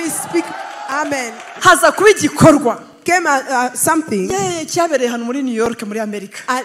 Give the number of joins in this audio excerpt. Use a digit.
1